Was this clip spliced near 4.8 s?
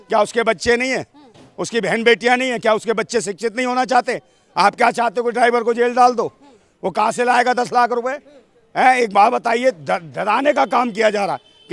no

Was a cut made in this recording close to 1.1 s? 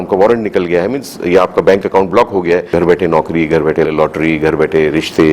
no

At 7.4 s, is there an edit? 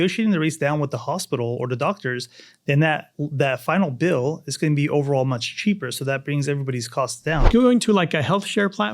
yes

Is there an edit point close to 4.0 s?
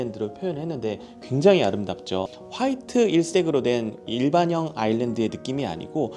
no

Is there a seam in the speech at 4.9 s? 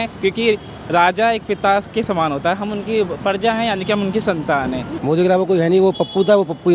yes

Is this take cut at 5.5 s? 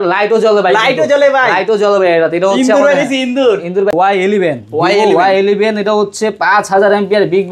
no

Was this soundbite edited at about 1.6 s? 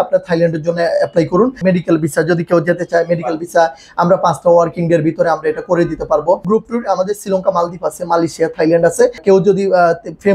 yes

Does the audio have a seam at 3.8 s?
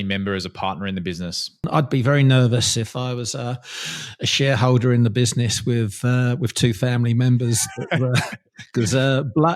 no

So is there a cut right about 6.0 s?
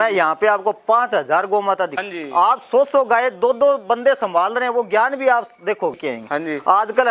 yes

